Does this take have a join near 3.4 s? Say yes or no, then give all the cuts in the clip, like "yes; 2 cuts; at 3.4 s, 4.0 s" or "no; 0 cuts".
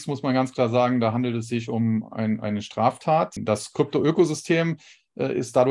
yes; 1 cut; at 3.4 s